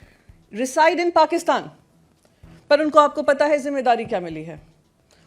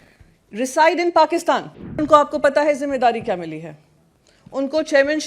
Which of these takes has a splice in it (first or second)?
second